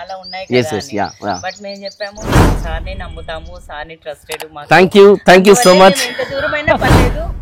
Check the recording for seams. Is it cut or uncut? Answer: uncut